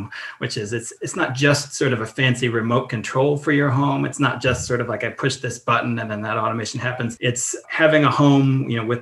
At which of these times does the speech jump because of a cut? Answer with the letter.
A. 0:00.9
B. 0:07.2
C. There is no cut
B